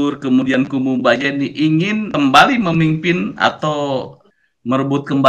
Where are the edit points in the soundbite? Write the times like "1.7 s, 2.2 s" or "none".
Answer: 2.1 s, 4.2 s